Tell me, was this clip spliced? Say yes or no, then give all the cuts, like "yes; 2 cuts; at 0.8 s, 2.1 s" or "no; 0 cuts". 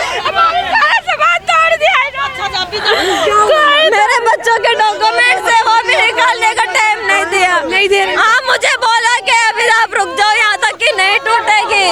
no; 0 cuts